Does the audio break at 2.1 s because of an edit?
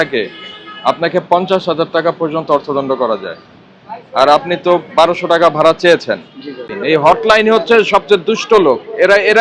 no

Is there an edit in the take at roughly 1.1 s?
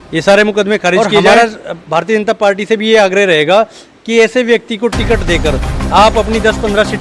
yes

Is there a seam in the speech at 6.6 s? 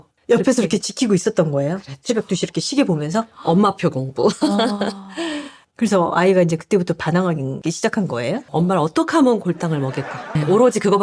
no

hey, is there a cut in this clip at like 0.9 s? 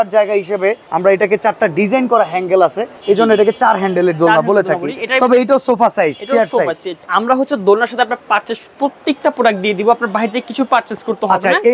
yes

